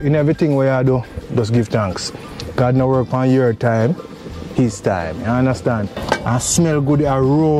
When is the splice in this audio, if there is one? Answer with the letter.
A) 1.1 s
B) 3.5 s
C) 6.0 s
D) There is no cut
C